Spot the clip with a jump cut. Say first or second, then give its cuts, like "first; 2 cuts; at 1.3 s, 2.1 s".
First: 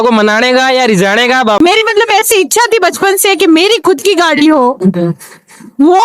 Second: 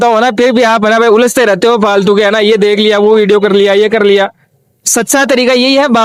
first; 1 cut; at 1.6 s